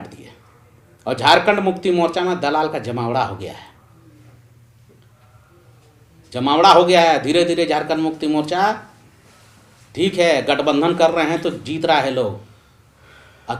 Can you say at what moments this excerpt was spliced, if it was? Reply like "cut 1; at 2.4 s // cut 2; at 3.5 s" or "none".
none